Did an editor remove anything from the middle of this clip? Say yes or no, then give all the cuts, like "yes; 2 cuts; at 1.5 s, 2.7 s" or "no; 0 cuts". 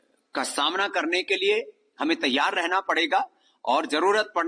no; 0 cuts